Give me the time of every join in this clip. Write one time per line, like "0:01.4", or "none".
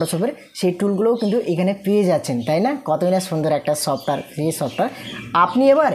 none